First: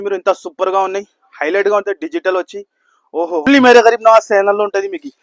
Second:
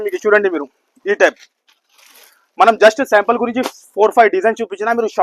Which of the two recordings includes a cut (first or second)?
first